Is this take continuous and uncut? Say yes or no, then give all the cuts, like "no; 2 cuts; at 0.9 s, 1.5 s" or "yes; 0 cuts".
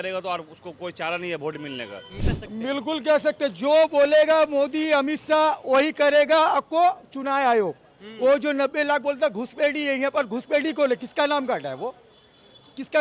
no; 1 cut; at 2.3 s